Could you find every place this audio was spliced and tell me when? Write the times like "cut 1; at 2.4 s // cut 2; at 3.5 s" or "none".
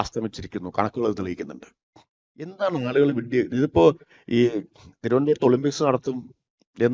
cut 1; at 2.5 s

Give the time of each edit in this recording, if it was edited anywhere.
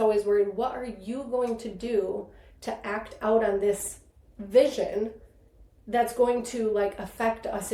none

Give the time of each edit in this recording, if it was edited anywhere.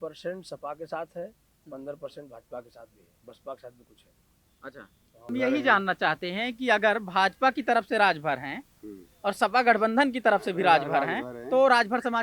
cut 1; at 5.3 s

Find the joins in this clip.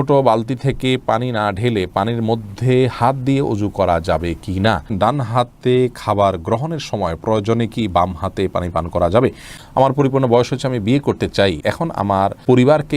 cut 1; at 4.9 s // cut 2; at 9.5 s // cut 3; at 12.0 s

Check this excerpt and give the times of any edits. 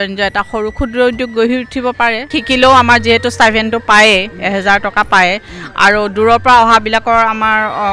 cut 1; at 2.3 s

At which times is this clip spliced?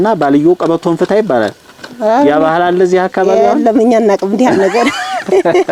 none

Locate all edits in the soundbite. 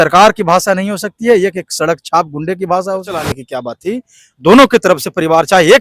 cut 1; at 3.2 s

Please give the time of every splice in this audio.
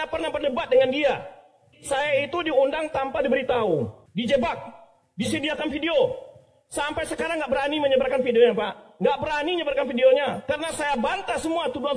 cut 1; at 4.0 s

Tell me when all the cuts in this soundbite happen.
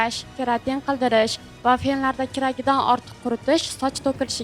none

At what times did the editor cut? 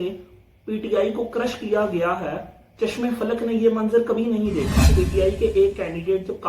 cut 1; at 4.9 s

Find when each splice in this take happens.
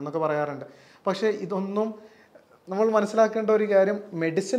none

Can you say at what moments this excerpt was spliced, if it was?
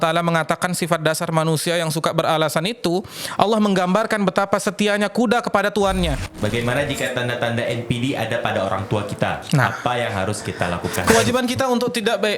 cut 1; at 6.3 s // cut 2; at 10.9 s

